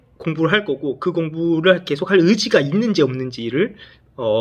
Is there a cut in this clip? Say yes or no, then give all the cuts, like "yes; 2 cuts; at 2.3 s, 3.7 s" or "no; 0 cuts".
no; 0 cuts